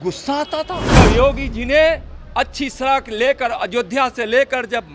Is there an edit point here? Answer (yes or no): yes